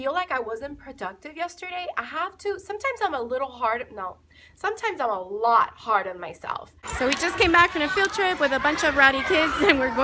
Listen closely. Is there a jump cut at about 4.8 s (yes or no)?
no